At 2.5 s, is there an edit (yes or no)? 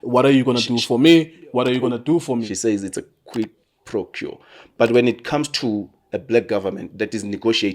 yes